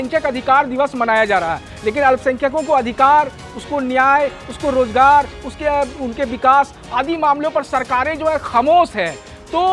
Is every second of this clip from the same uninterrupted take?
yes; 0 cuts

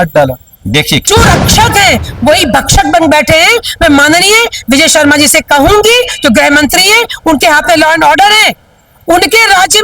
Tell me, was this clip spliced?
yes; 1 cut; at 1.1 s

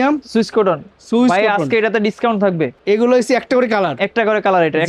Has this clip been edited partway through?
yes; 1 cut; at 2.8 s

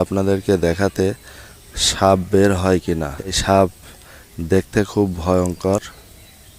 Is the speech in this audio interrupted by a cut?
yes; 1 cut; at 3.4 s

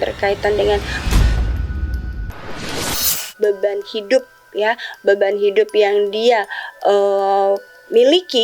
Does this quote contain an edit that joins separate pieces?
yes; 2 cuts; at 1.0 s, 3.2 s

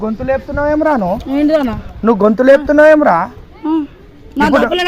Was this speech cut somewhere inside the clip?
no; 0 cuts

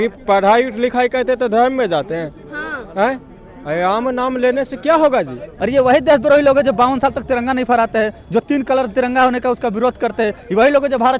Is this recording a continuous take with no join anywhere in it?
no; 1 cut; at 5.4 s

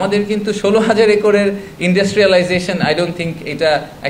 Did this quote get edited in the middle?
no; 0 cuts

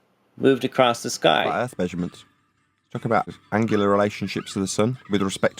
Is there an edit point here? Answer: yes; 2 cuts; at 1.6 s, 3.3 s

